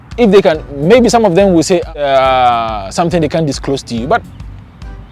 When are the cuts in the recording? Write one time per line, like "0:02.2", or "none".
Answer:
0:02.0